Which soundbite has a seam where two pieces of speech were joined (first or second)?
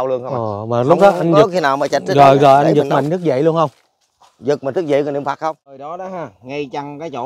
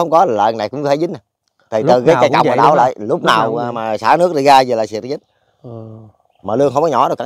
first